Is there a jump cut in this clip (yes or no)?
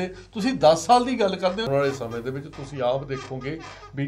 yes